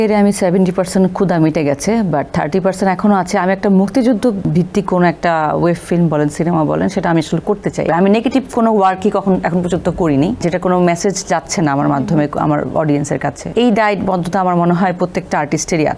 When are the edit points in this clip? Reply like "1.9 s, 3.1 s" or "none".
4.5 s, 7.9 s, 10.4 s, 13.4 s